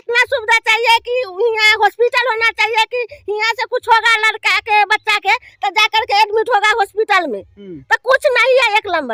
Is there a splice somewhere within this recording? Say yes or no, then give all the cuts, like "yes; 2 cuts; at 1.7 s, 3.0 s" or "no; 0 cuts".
no; 0 cuts